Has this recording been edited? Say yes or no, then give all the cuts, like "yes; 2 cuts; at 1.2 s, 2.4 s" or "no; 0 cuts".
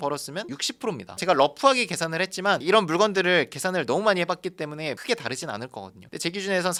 no; 0 cuts